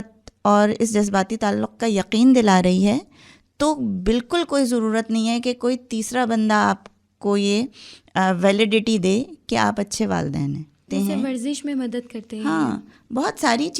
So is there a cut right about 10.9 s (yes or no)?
yes